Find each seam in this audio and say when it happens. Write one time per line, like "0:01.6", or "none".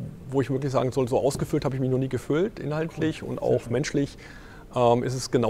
none